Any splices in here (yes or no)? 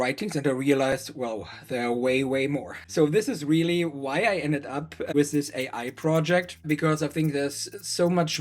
yes